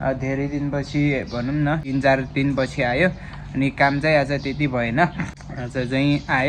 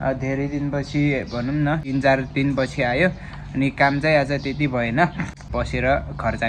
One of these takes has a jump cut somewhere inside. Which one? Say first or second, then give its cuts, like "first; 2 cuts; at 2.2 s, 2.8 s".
second; 1 cut; at 5.5 s